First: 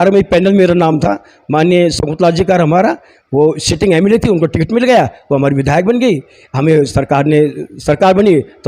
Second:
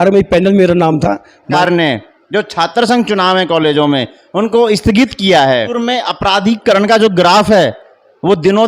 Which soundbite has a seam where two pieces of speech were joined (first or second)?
second